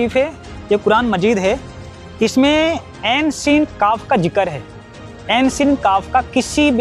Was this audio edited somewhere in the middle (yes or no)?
yes